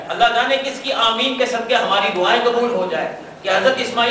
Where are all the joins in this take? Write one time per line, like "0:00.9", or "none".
0:02.6